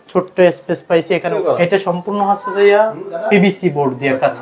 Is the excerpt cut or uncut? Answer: cut